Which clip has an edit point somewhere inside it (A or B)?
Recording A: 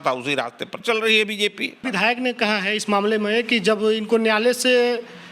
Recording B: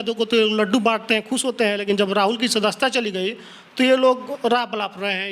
A